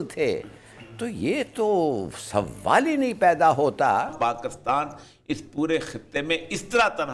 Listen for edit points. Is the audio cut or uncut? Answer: cut